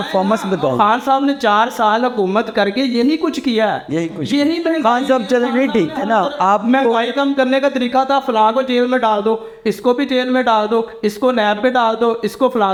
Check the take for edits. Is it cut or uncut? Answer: uncut